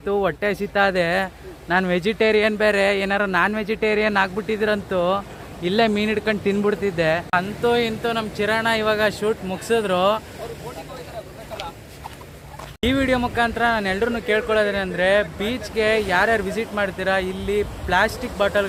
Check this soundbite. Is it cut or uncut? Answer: uncut